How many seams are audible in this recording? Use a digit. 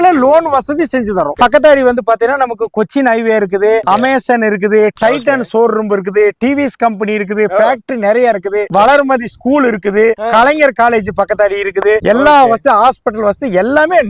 3